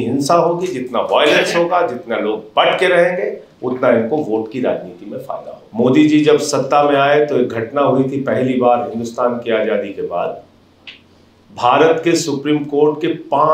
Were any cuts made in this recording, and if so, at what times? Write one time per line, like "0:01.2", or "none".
0:05.5